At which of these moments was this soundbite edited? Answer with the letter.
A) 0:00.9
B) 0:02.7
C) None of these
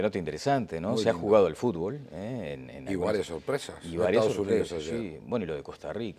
A